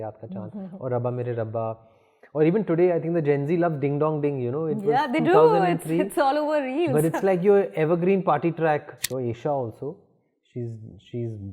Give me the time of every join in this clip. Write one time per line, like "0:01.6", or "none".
0:09.0